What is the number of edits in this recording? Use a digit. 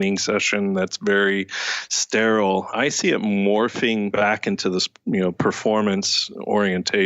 2